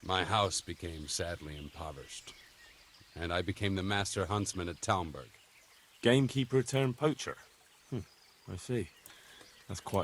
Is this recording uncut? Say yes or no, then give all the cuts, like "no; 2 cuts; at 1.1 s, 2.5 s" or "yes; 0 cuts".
yes; 0 cuts